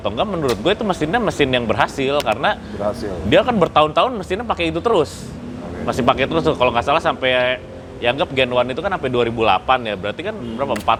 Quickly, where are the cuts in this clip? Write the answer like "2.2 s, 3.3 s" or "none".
none